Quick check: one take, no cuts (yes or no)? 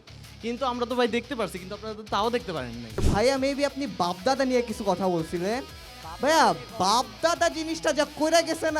no